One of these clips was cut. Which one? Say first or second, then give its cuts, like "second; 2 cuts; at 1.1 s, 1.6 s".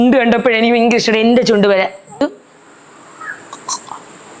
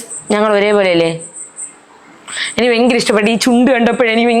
first; 1 cut; at 2.2 s